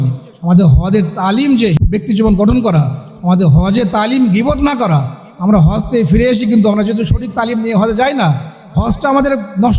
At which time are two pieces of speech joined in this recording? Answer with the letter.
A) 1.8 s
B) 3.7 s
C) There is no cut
A